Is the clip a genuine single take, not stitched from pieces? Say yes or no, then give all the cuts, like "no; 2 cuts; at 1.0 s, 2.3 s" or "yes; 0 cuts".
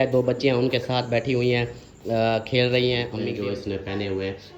no; 1 cut; at 3.2 s